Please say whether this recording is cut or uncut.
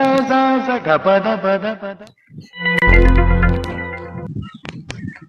cut